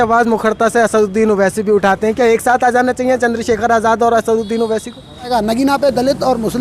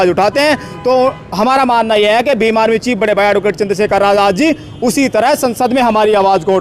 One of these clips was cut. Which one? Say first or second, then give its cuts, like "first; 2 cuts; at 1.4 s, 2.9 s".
first; 1 cut; at 5.3 s